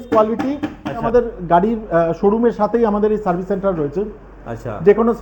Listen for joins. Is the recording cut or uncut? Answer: cut